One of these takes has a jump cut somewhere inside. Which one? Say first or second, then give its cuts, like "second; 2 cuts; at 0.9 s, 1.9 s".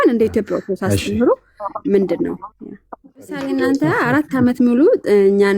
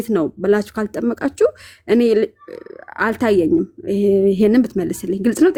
first; 1 cut; at 3.4 s